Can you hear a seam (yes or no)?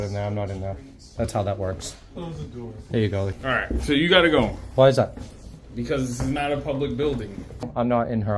yes